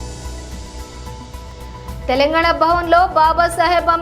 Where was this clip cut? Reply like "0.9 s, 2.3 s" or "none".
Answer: 1.3 s